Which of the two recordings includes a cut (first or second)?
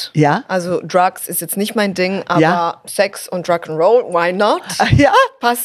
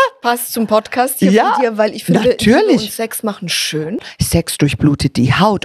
second